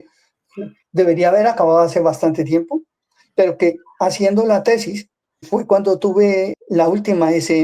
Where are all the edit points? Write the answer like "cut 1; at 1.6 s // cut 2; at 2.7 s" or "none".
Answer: cut 1; at 5.4 s // cut 2; at 6.5 s